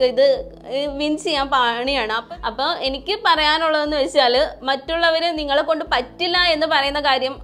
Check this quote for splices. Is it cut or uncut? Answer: cut